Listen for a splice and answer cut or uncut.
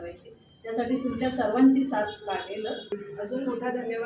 cut